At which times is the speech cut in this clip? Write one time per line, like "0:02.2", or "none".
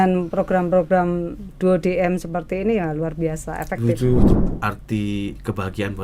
0:04.3